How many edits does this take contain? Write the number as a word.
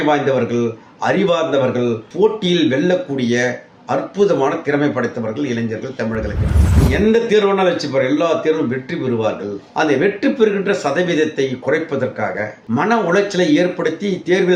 zero